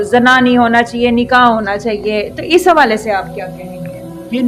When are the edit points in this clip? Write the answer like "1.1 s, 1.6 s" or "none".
none